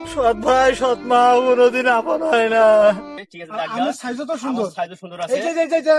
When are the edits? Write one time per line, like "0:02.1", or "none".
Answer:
0:03.2